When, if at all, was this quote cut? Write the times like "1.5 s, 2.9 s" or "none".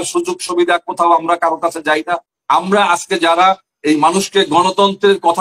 2.3 s